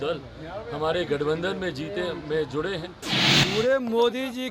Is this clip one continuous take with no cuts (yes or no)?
no